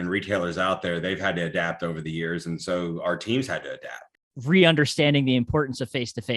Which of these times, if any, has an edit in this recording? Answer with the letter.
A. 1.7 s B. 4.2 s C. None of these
B